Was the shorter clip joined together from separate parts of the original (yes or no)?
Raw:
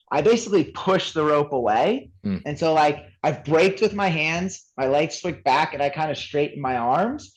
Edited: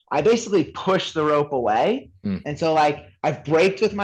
no